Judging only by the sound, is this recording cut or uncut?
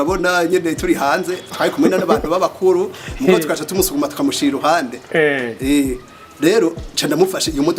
uncut